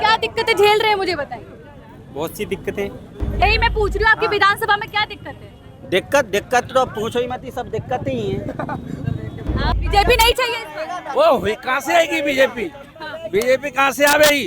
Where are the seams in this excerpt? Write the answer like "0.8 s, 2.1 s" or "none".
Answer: 3.4 s, 9.8 s